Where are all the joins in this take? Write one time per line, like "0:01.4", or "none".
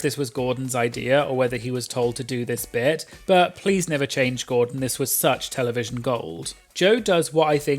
0:06.6